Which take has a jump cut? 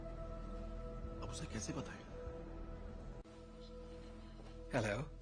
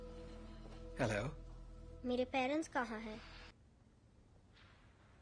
second; 1 cut; at 3.6 s

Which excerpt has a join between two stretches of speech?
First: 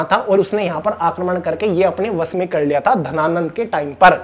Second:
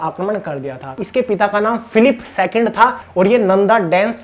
second; 2 cuts; at 1.0 s, 3.0 s

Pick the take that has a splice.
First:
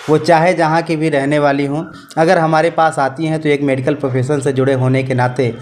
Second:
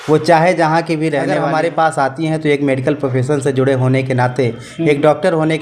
second; 1 cut; at 1.4 s

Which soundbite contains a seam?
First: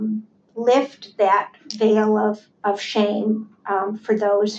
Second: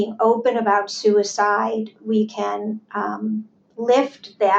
first; 1 cut; at 2.5 s

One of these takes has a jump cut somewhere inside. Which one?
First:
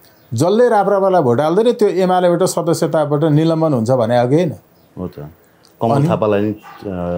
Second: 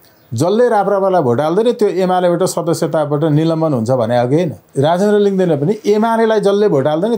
second; 1 cut; at 4.6 s

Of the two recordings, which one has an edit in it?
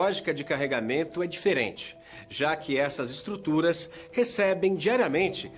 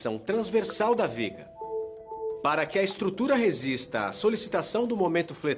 first; 1 cut; at 2.4 s

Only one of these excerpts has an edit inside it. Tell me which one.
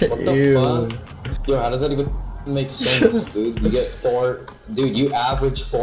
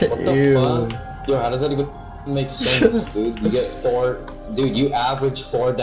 second; 1 cut; at 1.1 s

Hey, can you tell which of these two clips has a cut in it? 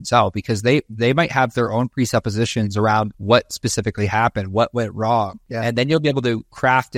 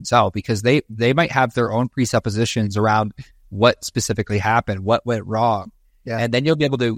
first; 2 cuts; at 3.2 s, 5.4 s

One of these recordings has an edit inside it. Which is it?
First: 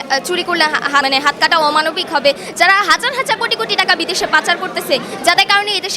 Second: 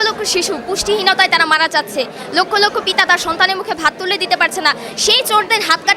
first; 1 cut; at 1.0 s

